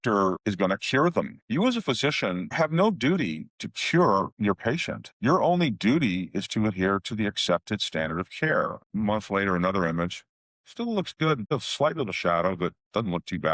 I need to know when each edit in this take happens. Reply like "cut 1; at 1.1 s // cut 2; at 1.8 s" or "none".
cut 1; at 8.8 s // cut 2; at 11.5 s